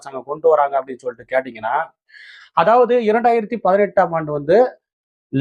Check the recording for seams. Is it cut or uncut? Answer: uncut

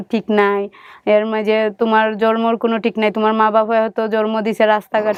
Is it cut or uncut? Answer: uncut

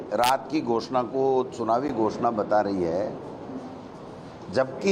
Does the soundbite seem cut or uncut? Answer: uncut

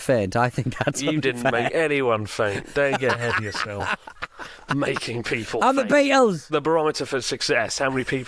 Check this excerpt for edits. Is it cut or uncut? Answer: cut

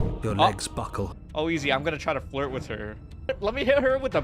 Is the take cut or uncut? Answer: cut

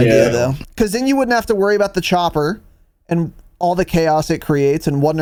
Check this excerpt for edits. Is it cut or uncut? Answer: uncut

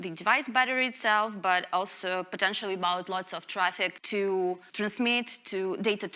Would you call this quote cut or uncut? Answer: cut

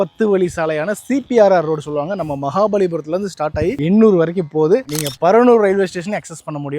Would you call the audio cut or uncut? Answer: cut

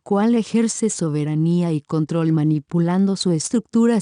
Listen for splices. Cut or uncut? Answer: uncut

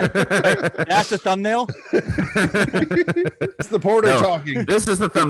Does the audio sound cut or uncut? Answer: cut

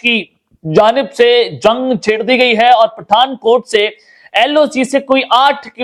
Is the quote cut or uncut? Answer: uncut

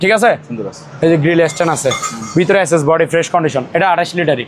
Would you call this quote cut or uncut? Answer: uncut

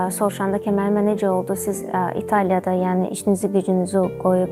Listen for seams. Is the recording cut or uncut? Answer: uncut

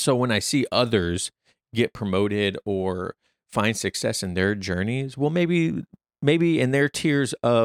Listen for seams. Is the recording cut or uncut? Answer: uncut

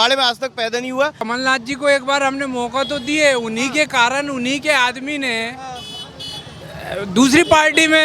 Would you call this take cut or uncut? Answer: cut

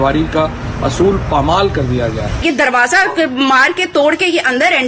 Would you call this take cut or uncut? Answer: cut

